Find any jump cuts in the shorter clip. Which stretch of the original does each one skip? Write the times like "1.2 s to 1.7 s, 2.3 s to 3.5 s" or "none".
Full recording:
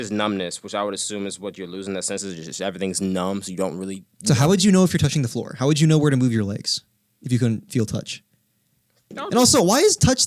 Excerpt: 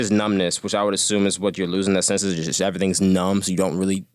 none